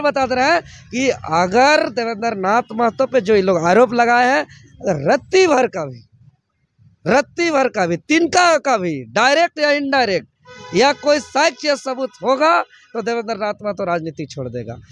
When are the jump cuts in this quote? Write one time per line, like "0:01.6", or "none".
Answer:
none

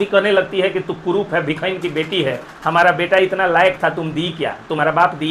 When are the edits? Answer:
none

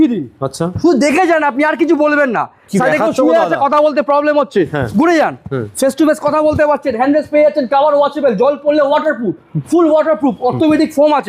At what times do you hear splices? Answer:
none

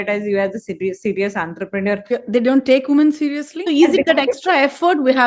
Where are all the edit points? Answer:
0:02.1
0:03.5

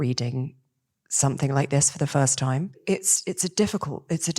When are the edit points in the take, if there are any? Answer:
0:02.8

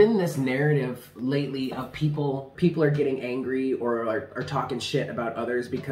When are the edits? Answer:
0:02.5

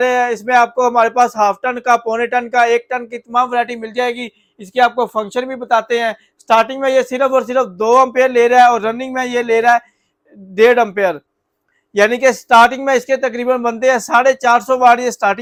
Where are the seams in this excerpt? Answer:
none

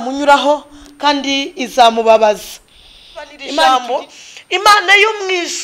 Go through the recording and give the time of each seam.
0:03.4

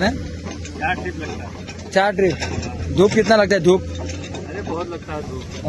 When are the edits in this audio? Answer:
none

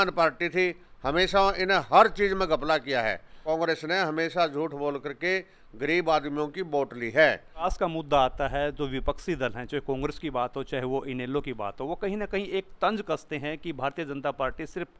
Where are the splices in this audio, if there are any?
0:03.3
0:07.6

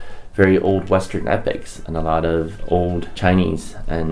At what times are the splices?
0:03.1

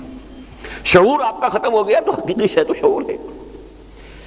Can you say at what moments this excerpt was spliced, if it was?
none

